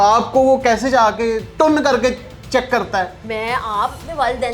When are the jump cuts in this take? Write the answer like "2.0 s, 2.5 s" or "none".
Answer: 1.5 s, 3.2 s